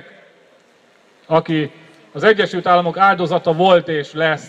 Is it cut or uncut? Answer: uncut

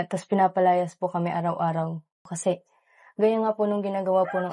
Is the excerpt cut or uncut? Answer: cut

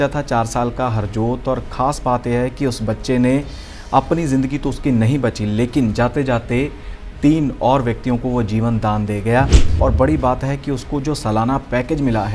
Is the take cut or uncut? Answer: cut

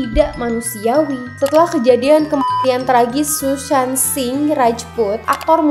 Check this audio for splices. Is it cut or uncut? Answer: cut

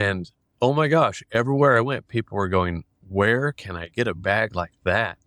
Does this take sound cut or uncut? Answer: uncut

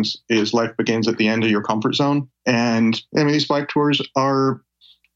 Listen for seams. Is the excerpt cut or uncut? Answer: cut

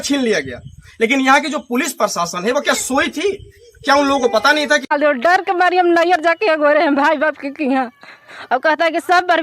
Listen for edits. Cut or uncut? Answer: cut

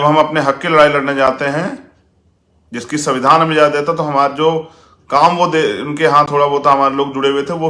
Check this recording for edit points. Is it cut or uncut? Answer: uncut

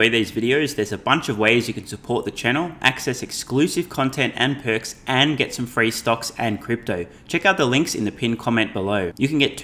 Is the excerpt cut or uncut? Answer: uncut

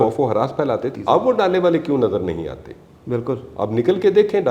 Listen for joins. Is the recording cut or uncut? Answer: cut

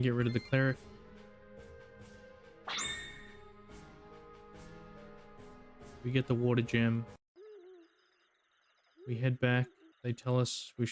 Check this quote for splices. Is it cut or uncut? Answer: cut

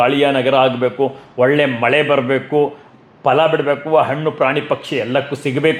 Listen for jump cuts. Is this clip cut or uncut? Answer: uncut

